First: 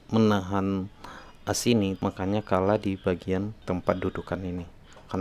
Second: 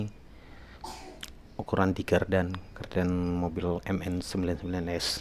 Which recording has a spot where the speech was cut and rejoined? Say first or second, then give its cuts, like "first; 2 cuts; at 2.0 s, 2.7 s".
first; 2 cuts; at 2.0 s, 3.6 s